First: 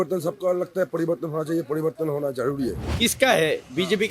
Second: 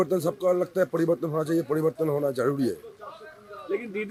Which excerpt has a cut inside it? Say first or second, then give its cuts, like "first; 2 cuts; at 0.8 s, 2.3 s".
first; 1 cut; at 2.8 s